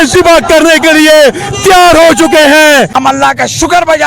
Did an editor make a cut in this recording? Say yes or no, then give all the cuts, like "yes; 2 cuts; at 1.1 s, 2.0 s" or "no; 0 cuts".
yes; 1 cut; at 2.9 s